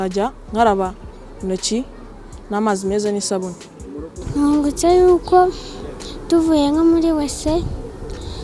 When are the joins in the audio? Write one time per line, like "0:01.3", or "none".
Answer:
0:04.1